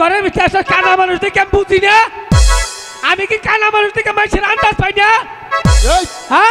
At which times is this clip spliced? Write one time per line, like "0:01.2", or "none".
none